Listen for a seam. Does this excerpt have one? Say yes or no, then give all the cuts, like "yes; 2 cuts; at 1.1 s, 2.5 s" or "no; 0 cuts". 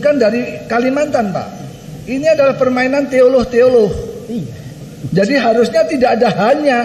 no; 0 cuts